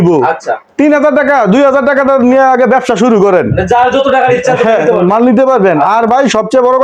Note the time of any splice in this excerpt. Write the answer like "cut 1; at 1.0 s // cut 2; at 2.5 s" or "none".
none